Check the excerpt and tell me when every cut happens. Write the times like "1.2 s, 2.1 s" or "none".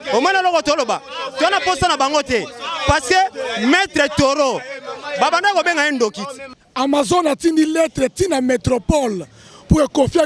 6.5 s